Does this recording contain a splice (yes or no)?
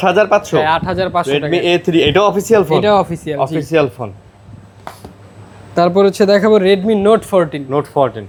no